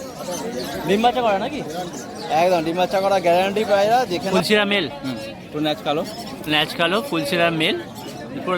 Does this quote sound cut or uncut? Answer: cut